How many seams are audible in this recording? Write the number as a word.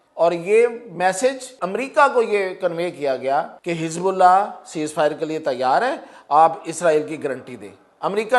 two